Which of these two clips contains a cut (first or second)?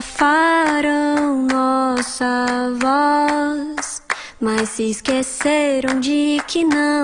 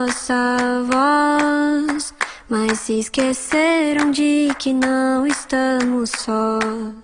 first